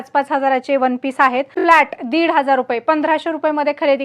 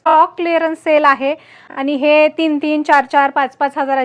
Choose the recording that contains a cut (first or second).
first